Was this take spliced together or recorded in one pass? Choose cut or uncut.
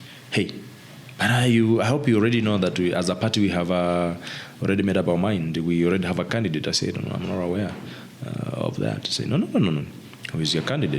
uncut